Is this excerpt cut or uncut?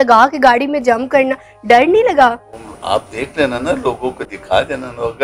uncut